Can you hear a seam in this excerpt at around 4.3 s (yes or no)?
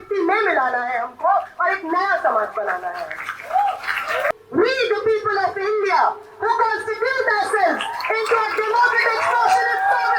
yes